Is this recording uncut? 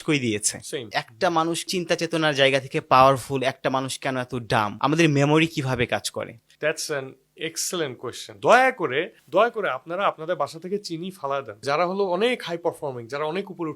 no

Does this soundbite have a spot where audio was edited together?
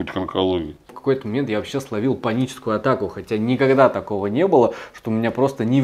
yes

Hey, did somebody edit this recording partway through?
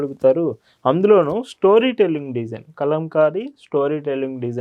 no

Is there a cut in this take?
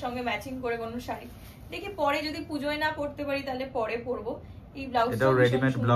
no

